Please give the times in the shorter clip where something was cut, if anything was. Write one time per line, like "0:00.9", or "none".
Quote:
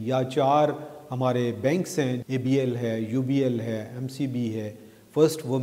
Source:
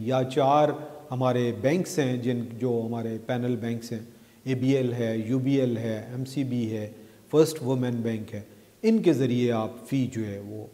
0:02.2